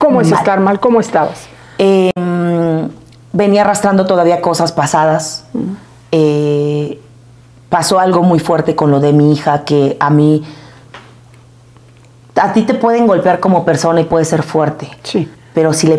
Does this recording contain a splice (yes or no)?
no